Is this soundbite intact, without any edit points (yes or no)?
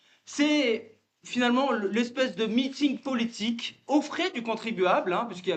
yes